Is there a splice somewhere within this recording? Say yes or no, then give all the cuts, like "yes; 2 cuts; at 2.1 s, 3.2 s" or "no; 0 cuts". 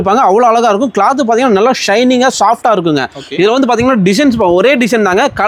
no; 0 cuts